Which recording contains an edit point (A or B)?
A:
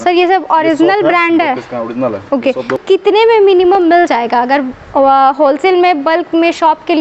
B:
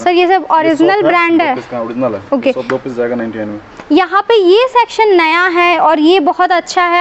A